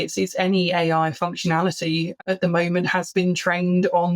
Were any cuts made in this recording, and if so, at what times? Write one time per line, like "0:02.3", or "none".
0:02.2